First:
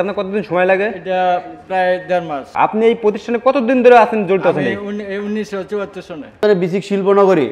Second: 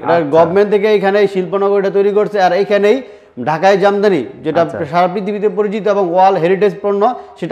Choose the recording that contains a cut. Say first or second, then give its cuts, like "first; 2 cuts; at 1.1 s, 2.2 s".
first; 2 cuts; at 2.6 s, 6.4 s